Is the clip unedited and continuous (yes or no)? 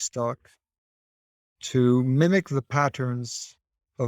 yes